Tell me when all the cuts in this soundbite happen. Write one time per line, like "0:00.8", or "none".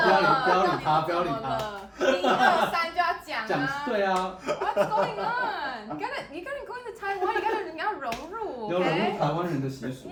none